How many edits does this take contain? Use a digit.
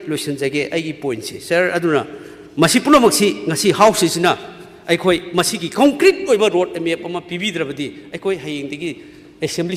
0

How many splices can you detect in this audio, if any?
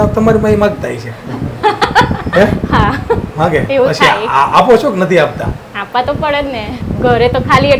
1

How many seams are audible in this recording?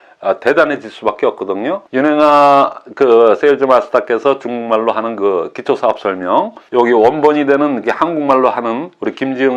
2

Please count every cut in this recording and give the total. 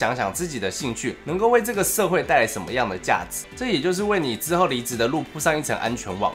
1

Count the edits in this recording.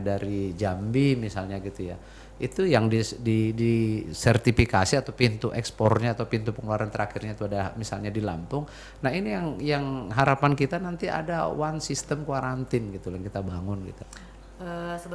1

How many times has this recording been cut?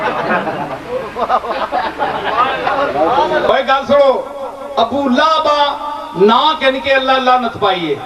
1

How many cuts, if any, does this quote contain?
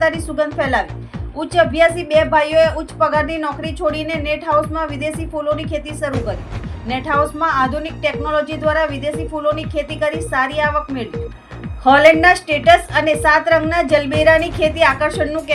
0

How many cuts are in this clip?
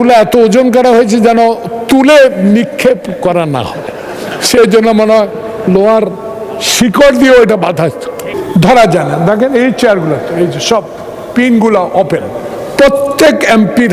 1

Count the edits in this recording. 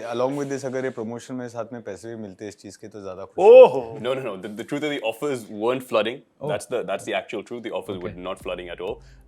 1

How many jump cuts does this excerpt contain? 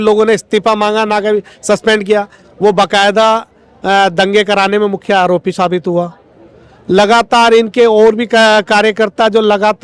0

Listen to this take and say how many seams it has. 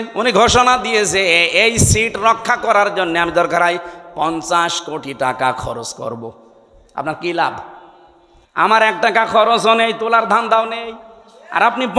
0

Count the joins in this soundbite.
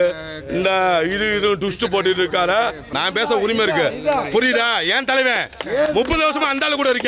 1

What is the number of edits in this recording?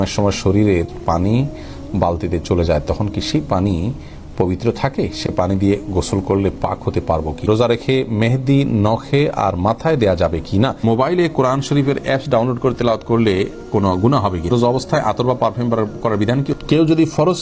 4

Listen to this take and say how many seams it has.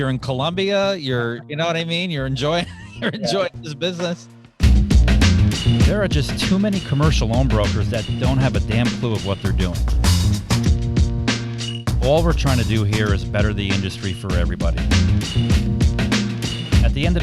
1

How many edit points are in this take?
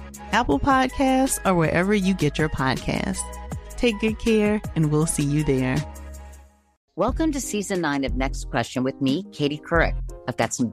1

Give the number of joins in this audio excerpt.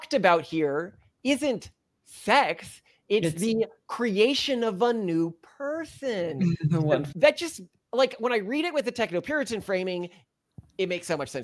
1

